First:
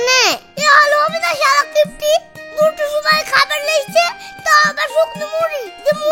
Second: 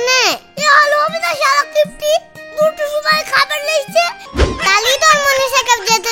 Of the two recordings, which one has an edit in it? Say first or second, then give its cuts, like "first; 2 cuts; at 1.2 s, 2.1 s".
second; 1 cut; at 4.2 s